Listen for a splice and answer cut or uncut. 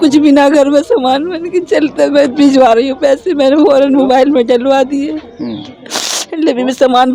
uncut